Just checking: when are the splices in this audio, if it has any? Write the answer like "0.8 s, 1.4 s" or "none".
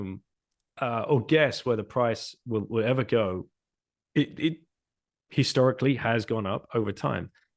none